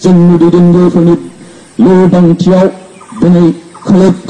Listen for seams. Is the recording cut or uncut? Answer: uncut